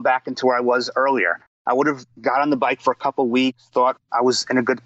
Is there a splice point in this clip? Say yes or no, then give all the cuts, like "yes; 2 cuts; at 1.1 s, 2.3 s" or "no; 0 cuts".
no; 0 cuts